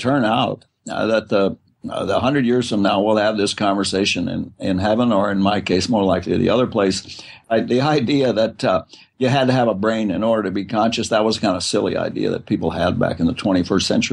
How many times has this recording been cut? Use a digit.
1